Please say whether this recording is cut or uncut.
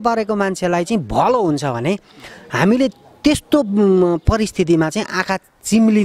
uncut